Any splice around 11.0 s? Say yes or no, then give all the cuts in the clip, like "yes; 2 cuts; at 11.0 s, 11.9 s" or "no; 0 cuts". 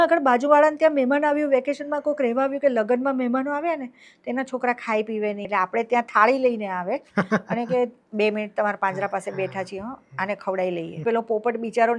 yes; 2 cuts; at 5.5 s, 11.0 s